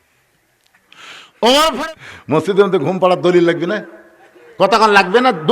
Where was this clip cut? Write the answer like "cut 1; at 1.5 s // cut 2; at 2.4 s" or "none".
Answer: cut 1; at 1.8 s